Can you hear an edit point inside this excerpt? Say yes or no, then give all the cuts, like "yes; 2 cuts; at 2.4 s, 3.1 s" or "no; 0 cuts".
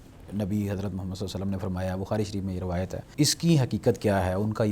yes; 1 cut; at 3.1 s